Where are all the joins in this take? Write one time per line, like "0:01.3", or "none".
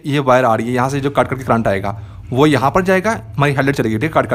none